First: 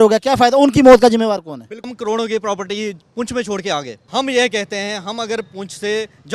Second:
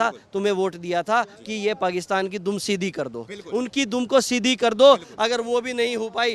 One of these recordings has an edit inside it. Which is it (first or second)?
first